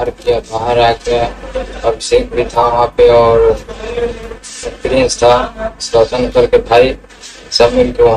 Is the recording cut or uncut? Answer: uncut